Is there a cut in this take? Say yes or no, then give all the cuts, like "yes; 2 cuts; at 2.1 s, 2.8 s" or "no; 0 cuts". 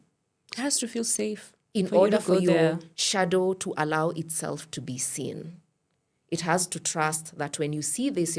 no; 0 cuts